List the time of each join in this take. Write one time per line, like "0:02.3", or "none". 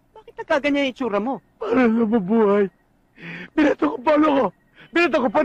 0:01.5